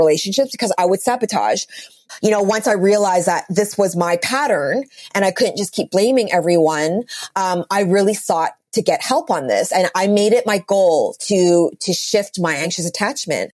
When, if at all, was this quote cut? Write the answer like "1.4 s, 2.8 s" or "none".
2.0 s, 12.7 s